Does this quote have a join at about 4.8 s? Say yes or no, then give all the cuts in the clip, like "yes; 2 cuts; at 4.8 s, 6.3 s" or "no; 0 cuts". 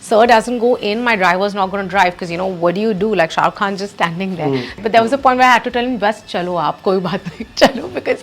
yes; 1 cut; at 4.8 s